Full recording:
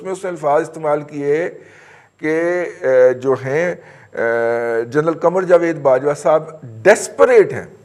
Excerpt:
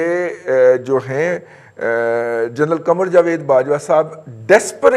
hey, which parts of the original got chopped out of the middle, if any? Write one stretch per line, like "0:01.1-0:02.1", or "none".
none